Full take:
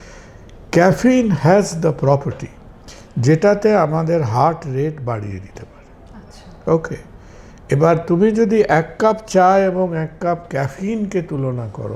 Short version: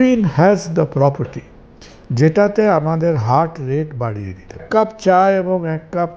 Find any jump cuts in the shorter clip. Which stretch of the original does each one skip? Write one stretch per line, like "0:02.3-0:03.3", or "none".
0:05.7-0:08.9